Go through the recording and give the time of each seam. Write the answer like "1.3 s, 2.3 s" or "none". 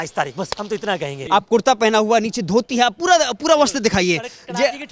1.2 s